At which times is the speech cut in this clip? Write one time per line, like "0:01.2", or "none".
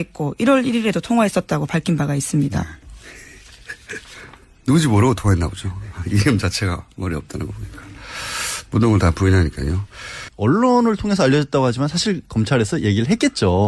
0:02.4